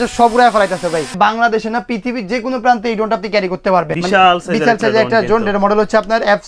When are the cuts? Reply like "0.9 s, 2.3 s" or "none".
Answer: 1.1 s, 3.9 s